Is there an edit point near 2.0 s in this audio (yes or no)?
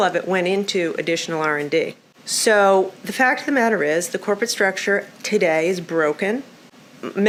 no